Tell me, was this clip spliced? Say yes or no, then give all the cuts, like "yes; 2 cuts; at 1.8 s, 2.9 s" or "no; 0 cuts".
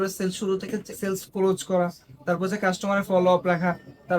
yes; 1 cut; at 0.9 s